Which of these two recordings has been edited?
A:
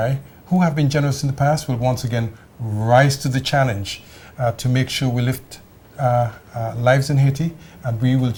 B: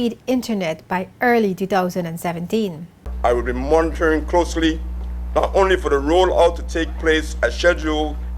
B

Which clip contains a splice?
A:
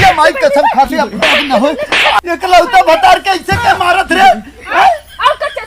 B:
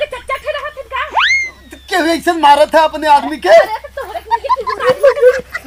A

